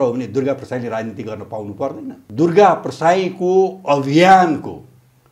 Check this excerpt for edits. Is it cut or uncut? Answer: cut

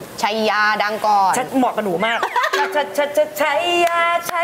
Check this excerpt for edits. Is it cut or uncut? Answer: cut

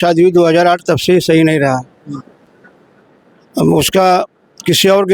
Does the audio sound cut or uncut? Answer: uncut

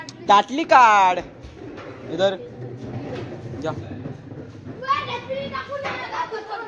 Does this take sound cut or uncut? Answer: uncut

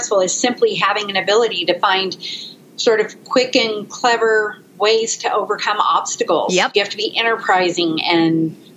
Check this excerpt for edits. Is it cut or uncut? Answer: uncut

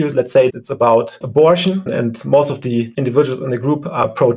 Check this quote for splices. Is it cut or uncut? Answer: uncut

